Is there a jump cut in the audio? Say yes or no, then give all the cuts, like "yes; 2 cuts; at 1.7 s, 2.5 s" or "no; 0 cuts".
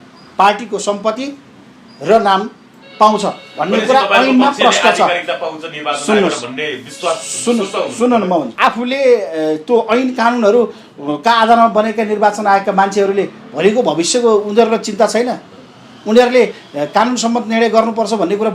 yes; 1 cut; at 8.5 s